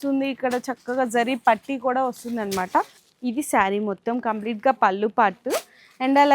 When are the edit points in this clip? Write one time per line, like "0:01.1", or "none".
0:03.0